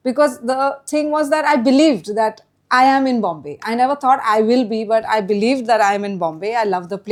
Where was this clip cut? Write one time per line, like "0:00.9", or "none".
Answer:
none